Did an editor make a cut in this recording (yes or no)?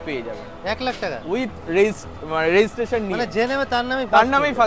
no